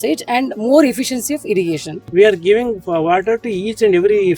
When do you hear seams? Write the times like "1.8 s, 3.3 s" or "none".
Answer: 2.0 s